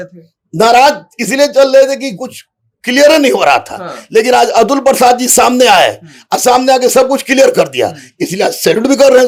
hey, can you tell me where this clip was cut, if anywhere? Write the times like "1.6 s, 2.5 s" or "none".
none